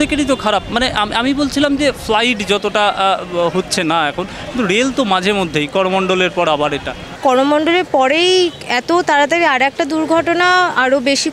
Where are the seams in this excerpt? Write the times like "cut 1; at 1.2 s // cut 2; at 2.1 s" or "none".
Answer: cut 1; at 7.2 s